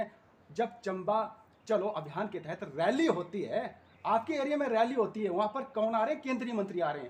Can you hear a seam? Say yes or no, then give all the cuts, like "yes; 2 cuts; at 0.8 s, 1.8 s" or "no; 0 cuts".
no; 0 cuts